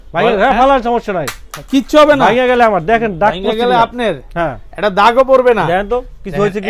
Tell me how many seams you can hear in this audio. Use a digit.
0